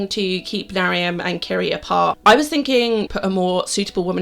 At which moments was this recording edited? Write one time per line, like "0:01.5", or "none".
0:02.2
0:03.1